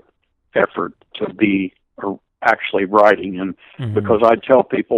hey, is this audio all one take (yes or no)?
no